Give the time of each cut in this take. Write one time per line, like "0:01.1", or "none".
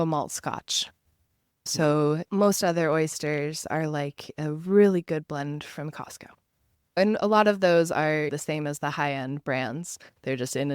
0:01.7
0:02.2
0:07.0